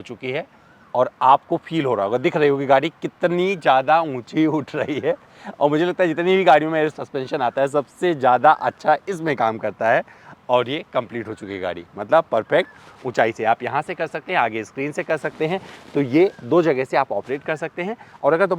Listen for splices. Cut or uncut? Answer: uncut